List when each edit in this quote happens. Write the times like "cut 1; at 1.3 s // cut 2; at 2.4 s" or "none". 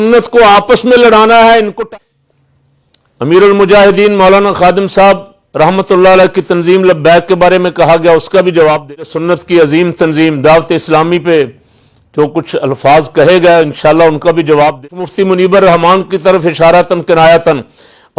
cut 1; at 1.9 s // cut 2; at 9.1 s // cut 3; at 14.8 s